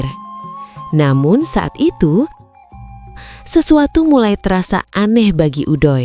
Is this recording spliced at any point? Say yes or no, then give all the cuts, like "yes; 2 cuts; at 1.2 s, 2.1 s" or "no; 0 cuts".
no; 0 cuts